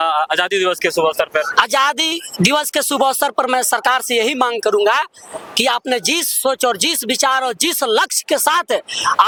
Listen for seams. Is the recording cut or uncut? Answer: uncut